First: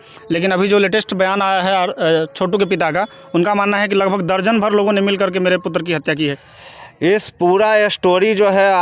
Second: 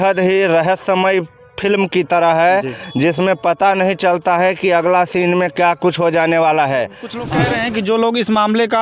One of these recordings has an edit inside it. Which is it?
second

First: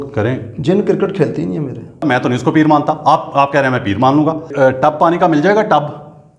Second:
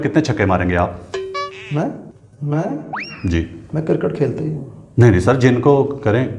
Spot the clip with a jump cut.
first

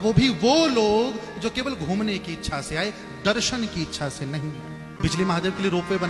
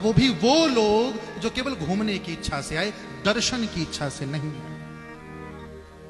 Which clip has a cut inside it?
first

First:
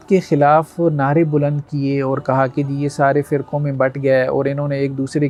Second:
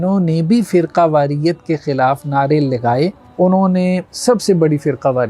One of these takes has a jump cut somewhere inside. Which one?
second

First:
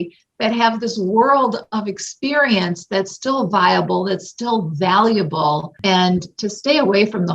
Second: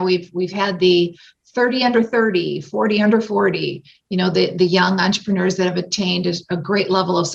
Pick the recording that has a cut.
first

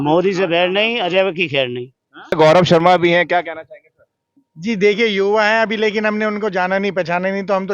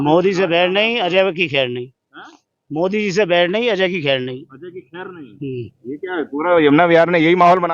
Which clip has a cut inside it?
first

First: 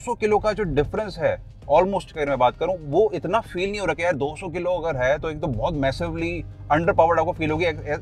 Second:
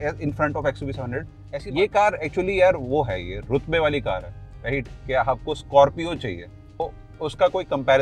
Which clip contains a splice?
second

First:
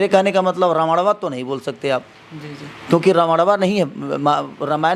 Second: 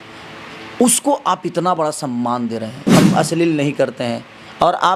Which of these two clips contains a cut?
second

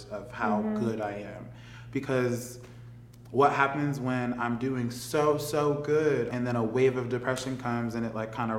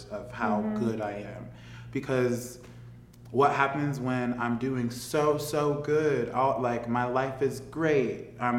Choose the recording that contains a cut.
first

